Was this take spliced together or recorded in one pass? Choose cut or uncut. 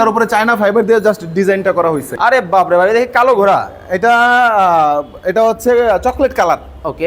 cut